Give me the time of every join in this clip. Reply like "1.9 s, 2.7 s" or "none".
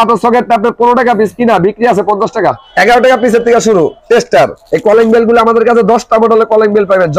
2.6 s, 4.6 s